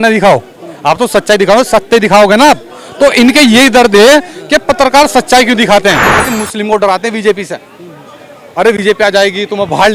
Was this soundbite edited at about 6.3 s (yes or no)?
yes